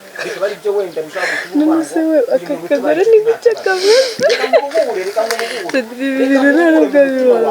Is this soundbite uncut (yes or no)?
yes